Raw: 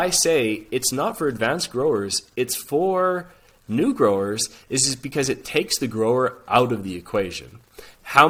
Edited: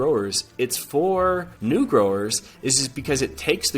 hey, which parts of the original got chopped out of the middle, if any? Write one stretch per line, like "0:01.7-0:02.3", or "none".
0:03.3-0:03.6

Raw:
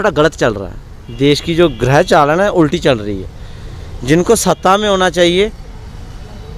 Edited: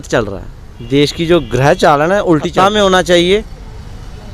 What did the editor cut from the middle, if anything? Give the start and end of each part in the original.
0:02.8-0:04.6

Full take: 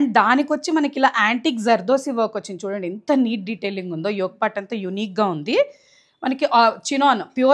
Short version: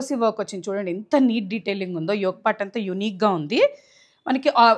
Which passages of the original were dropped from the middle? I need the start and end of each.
none

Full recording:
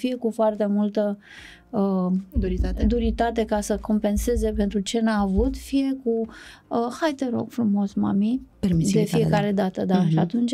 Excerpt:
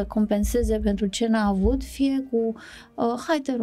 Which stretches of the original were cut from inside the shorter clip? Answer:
none

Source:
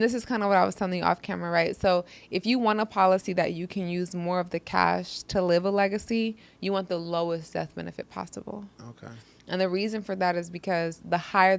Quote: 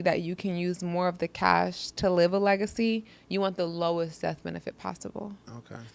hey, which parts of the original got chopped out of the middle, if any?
none

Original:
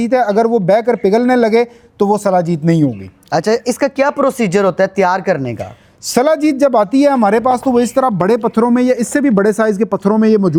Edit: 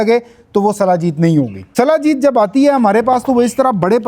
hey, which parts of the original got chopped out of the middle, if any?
0:03.0-0:06.0

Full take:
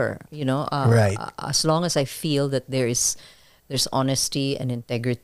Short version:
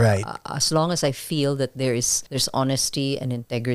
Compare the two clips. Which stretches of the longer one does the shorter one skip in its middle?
0:03.1-0:03.6

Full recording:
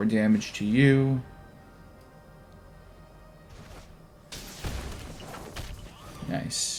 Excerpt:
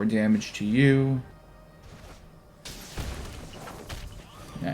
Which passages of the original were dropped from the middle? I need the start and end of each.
0:01.3-0:03.0

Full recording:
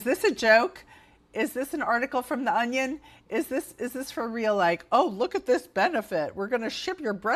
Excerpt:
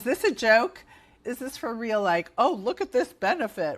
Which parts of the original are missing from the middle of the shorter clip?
0:01.2-0:03.7

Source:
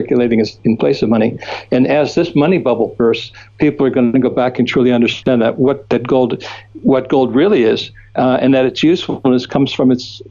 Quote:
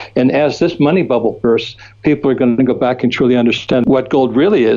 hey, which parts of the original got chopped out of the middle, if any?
0:05.4-0:06.8

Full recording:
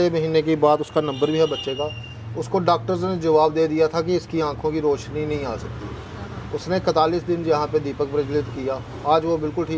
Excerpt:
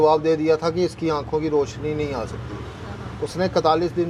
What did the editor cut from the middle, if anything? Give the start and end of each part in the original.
none

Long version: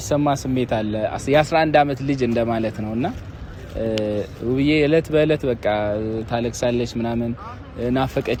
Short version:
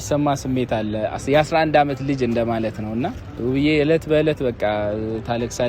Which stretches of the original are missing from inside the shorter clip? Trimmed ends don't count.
0:03.3-0:04.3

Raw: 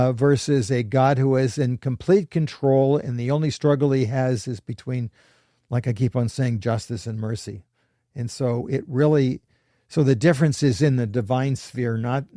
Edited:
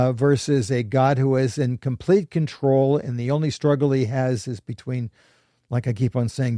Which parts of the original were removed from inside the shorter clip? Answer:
none

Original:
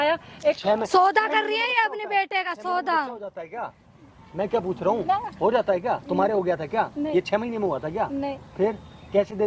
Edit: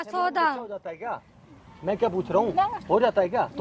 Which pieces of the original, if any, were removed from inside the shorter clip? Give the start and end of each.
none

